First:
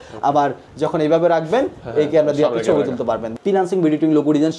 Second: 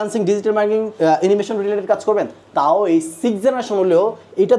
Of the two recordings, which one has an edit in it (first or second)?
first